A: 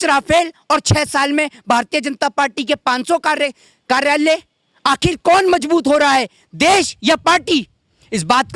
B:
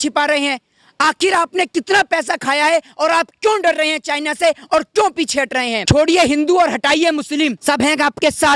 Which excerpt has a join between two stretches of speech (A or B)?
B